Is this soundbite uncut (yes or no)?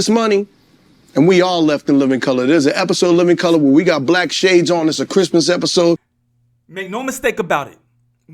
no